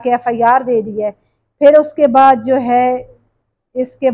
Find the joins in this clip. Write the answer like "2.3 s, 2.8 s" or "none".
none